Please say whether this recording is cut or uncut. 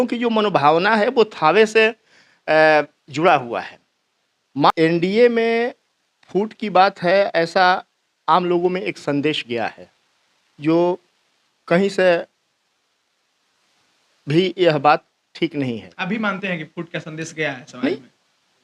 cut